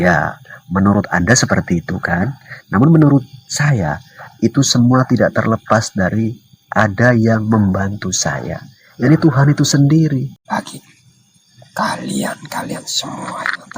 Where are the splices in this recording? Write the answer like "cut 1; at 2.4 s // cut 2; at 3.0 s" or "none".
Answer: cut 1; at 10.4 s